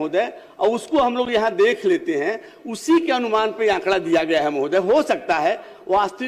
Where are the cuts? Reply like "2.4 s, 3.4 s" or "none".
none